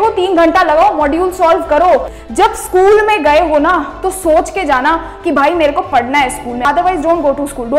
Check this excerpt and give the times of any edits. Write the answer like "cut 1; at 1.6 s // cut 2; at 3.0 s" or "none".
cut 1; at 2.2 s // cut 2; at 6.6 s